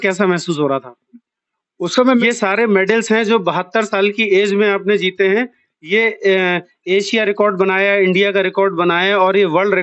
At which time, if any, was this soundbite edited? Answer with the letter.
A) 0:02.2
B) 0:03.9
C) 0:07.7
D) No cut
A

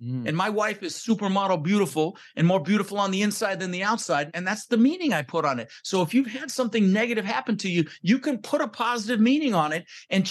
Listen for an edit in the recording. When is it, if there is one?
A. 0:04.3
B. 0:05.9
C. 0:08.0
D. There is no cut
A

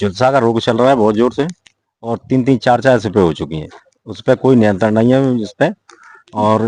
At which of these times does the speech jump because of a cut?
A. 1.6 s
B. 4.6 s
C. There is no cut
C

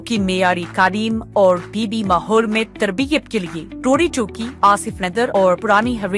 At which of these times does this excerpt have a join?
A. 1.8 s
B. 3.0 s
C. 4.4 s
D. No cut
D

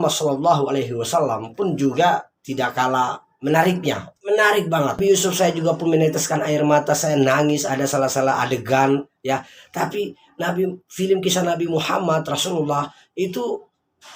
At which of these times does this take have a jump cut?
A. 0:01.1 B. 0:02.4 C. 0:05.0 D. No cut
C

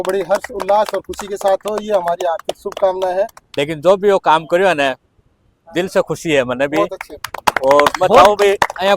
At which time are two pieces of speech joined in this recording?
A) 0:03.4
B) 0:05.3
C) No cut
A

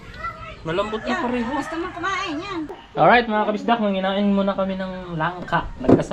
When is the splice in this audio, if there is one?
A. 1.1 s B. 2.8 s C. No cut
B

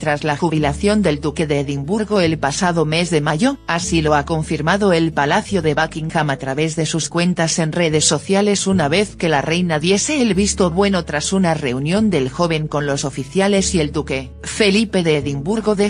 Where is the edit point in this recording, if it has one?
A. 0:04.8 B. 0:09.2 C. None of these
A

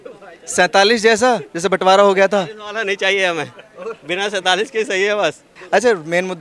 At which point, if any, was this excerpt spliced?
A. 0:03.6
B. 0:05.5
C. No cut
B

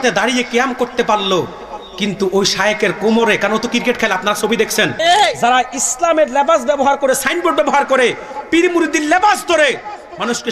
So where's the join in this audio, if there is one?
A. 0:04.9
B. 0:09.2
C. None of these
A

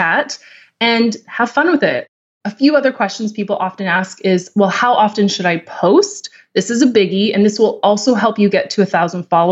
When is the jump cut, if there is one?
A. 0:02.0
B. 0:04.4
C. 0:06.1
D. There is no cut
A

